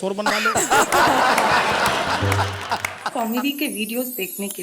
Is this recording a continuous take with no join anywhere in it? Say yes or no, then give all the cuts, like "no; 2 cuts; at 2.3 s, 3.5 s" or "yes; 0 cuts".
no; 1 cut; at 3.1 s